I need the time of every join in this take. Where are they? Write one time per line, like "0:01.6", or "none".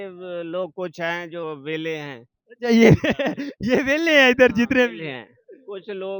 none